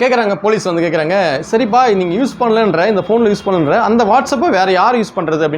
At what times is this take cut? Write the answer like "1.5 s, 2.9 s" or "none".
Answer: none